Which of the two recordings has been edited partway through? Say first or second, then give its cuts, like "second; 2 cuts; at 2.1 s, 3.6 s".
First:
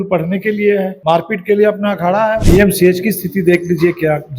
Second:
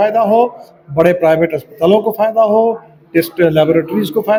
first; 2 cuts; at 0.9 s, 2.4 s